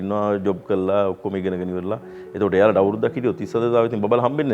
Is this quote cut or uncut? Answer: uncut